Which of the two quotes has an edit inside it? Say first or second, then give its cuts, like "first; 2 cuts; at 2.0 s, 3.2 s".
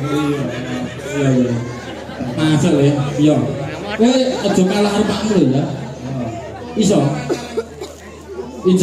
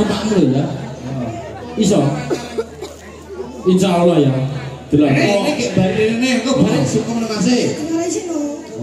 second; 1 cut; at 5.3 s